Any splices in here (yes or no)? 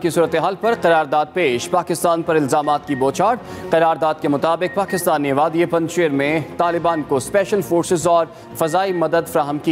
no